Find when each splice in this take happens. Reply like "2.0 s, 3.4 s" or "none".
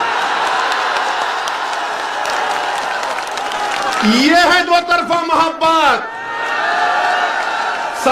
none